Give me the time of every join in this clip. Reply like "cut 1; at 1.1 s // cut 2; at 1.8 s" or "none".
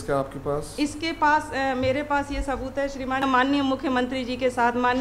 cut 1; at 3.2 s